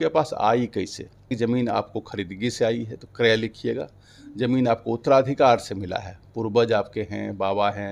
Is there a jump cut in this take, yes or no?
yes